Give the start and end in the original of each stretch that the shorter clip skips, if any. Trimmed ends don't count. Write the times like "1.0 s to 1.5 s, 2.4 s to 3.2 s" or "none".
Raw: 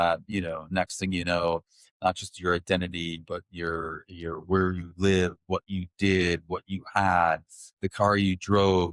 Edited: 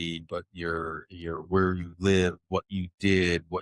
none

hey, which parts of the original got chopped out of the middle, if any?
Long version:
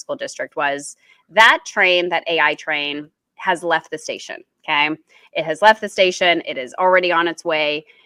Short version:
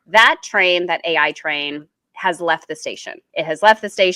4.4 s to 5.1 s

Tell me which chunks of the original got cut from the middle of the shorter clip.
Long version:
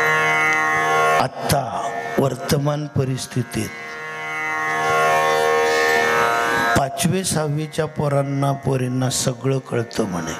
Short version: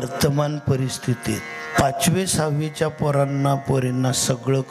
4.0 s to 6.7 s

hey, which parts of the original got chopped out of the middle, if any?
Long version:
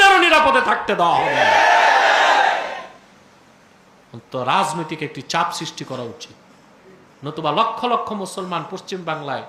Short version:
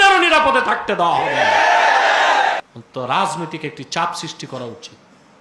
2.6 s to 4.0 s

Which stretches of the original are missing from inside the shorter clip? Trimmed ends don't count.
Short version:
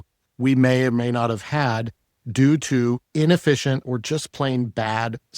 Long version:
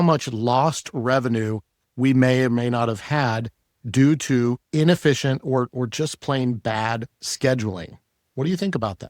5.4 s to 5.7 s

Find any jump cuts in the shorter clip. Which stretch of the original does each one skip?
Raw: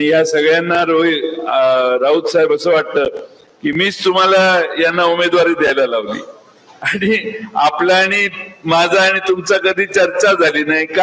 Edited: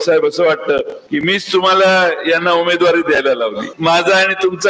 3.3 s to 3.5 s, 6.2 s to 8.5 s

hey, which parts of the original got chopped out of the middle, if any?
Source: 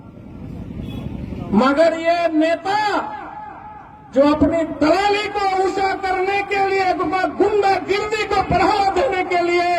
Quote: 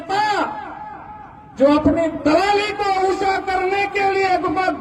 none

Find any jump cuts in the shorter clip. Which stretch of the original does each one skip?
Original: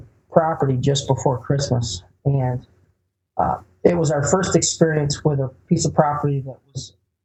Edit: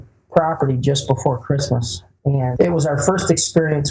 2.5 s to 3.8 s

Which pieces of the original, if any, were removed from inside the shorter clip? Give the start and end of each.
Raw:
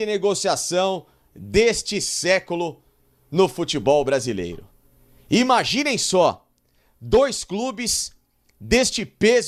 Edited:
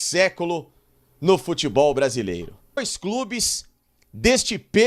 5.0 s to 7.4 s

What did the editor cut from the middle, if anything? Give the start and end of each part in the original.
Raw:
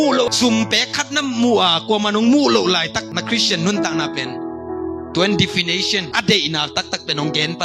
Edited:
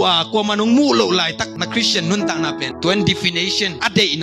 4.3 s to 5.1 s

